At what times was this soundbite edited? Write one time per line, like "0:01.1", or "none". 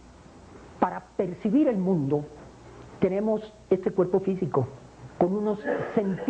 none